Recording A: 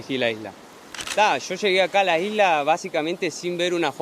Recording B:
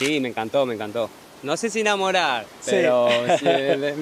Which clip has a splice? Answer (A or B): A